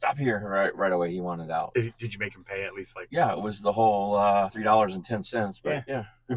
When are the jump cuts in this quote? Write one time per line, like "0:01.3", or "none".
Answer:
0:01.7
0:03.0
0:04.5